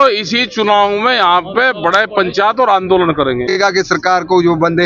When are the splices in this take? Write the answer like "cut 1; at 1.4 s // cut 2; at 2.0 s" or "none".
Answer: cut 1; at 3.6 s